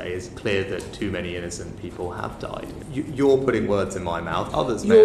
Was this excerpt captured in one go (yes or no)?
no